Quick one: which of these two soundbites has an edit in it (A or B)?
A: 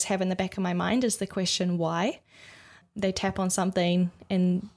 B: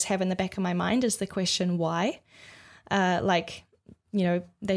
A